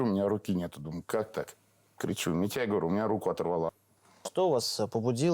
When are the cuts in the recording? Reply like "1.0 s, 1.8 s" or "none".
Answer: 3.7 s